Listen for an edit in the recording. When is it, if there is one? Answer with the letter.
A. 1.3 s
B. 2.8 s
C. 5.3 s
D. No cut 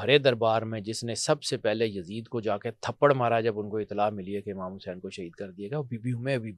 D